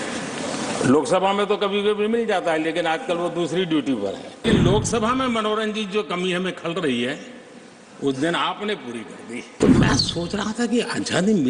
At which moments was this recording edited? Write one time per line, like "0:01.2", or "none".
0:04.4
0:09.5